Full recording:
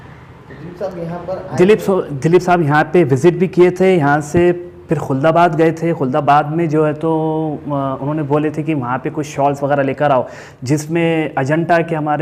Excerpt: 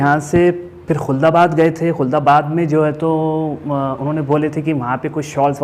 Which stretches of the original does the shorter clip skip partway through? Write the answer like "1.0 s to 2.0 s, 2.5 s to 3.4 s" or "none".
none